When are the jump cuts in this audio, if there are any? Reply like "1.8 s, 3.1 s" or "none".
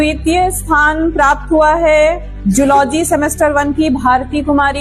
none